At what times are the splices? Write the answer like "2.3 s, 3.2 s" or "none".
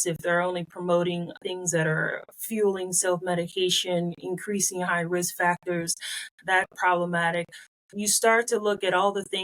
1.3 s, 6.7 s

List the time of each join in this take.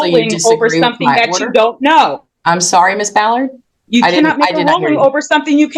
none

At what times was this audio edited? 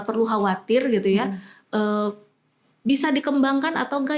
none

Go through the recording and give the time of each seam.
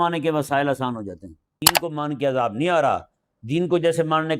1.8 s

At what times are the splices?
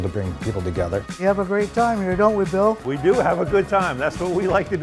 1.1 s

